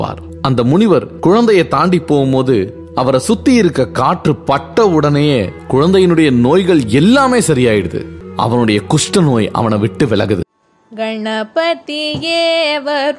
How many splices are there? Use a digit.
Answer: 1